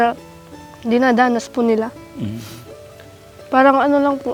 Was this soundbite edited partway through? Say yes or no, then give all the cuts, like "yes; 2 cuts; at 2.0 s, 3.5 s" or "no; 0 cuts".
no; 0 cuts